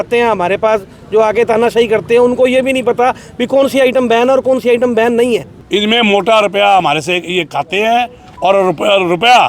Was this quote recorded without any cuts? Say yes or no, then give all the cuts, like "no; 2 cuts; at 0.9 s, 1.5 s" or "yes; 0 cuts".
no; 1 cut; at 5.5 s